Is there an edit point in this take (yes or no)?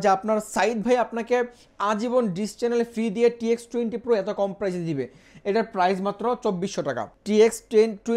no